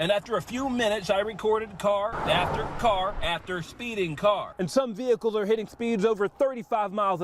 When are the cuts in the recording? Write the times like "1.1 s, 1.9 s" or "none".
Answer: 4.5 s